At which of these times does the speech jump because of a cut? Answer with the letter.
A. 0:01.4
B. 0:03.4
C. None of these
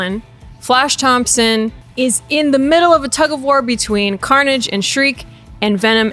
C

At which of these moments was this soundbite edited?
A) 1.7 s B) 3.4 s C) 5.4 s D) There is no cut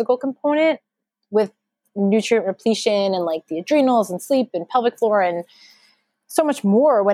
D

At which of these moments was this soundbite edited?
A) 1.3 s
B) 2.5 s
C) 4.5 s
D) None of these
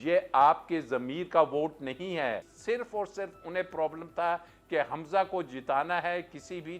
B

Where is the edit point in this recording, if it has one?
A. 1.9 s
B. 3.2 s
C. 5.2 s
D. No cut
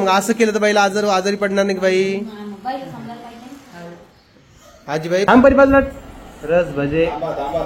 C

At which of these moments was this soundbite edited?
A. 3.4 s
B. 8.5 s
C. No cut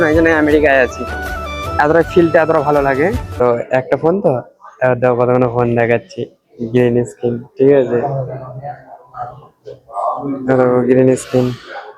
A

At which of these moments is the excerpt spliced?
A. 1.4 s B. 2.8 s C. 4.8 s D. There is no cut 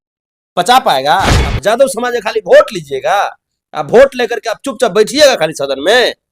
A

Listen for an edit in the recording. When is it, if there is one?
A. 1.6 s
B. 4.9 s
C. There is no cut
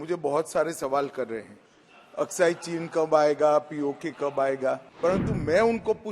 B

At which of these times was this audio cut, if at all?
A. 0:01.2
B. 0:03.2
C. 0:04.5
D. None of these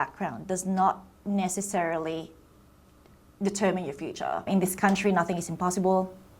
C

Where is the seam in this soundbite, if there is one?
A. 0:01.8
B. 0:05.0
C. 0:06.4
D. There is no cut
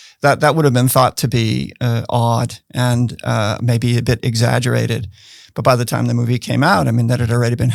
D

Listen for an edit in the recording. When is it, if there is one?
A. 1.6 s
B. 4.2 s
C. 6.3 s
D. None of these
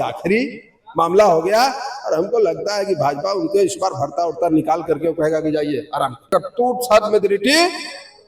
C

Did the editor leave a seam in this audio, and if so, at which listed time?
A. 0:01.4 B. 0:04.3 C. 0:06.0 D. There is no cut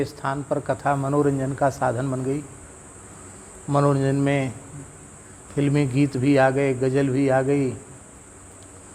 D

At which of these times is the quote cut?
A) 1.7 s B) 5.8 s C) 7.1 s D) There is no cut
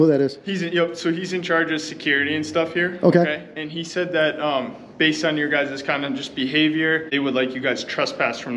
C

